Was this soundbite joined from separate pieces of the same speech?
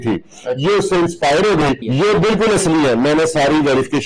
yes; 1 cut; at 1.8 s

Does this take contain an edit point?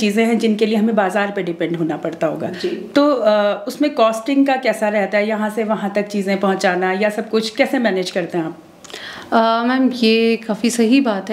no; 0 cuts

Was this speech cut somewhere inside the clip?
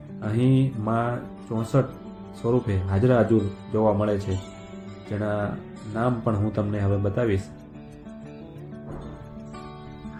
no; 0 cuts

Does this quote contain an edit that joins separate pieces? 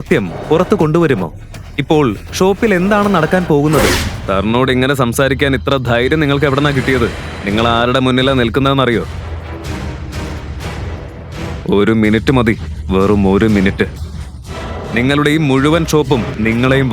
yes; 1 cut; at 4.1 s

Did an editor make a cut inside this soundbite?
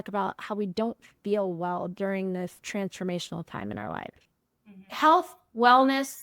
yes; 1 cut; at 4.8 s

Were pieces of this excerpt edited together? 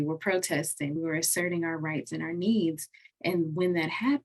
yes; 1 cut; at 0.9 s

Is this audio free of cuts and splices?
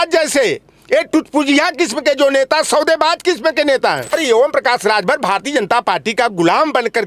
no; 1 cut; at 4.1 s

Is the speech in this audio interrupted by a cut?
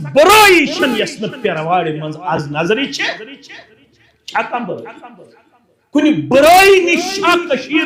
no; 0 cuts

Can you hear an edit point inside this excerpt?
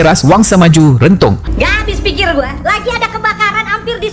yes; 1 cut; at 1.5 s

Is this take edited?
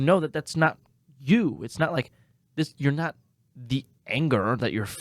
no; 0 cuts

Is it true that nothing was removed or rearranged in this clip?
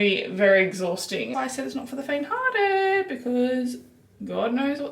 no; 1 cut; at 1.3 s

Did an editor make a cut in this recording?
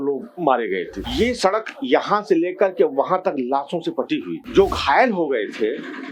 yes; 2 cuts; at 1.0 s, 4.3 s

